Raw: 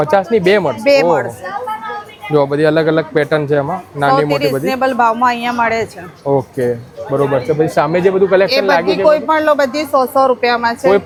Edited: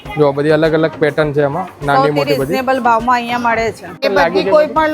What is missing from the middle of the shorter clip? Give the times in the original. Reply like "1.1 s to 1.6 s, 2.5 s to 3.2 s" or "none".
6.1 s to 8.5 s